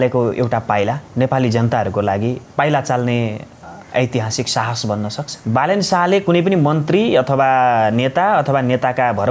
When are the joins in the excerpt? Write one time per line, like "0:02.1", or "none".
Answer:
0:01.0
0:02.4
0:05.3